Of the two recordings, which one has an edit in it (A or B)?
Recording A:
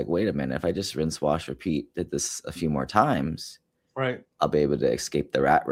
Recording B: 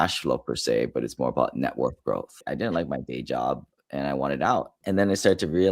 B